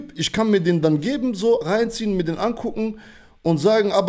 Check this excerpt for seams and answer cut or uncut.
uncut